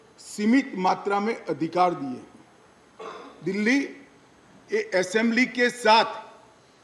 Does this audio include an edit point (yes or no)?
no